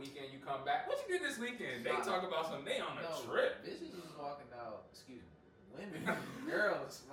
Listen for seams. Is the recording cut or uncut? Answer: uncut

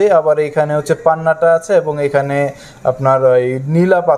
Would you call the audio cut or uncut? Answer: uncut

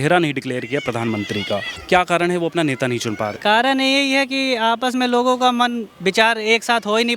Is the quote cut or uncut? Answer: cut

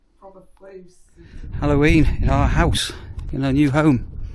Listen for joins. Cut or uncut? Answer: cut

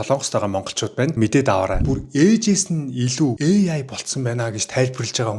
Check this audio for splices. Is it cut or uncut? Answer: cut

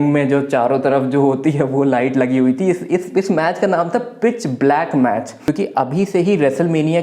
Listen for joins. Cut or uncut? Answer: cut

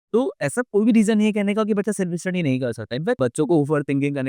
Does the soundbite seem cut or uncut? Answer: cut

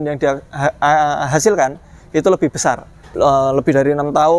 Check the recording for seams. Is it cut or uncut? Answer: cut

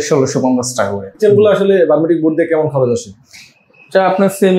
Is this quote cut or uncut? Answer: cut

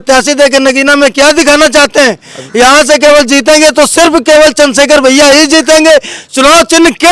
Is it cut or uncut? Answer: uncut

